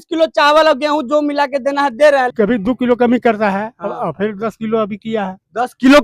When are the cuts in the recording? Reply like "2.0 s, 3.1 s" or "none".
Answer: 2.3 s